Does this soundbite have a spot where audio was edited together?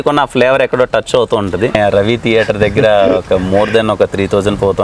yes; 1 cut; at 1.7 s

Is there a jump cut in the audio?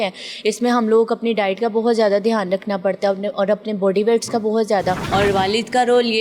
yes; 1 cut; at 5.0 s

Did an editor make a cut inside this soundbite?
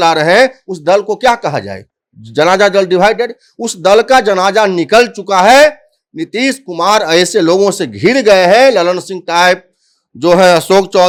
no; 0 cuts

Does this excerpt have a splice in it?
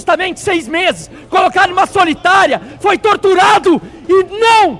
no; 0 cuts

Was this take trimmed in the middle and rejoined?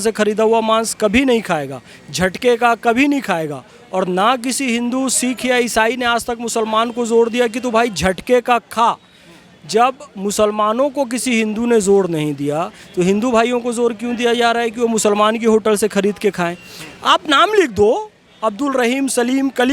no; 0 cuts

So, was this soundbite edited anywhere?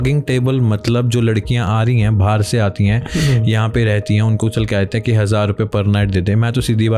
no; 0 cuts

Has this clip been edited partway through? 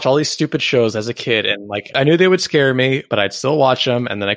no; 0 cuts

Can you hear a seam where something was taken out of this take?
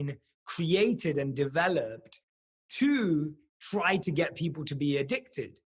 no; 0 cuts

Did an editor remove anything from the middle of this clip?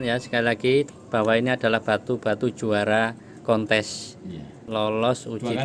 yes; 2 cuts; at 0.9 s, 4.6 s

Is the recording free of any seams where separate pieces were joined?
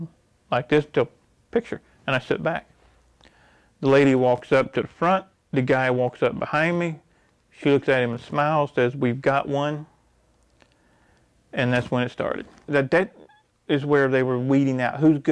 no; 1 cut; at 12.7 s

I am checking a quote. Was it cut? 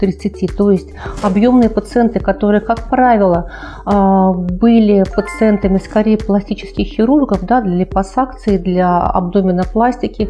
no; 0 cuts

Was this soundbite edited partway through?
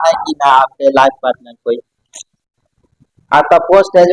no; 0 cuts

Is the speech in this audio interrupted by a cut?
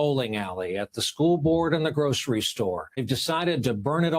yes; 1 cut; at 3.0 s

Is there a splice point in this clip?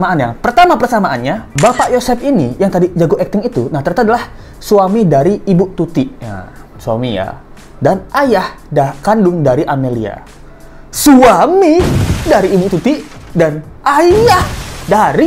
no; 0 cuts

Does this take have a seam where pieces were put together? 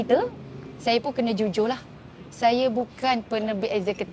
no; 0 cuts

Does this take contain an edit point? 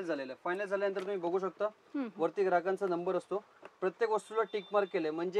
no; 0 cuts

